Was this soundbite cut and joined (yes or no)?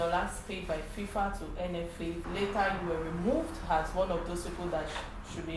yes